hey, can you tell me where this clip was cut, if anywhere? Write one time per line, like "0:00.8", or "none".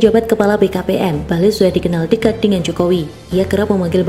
0:01.2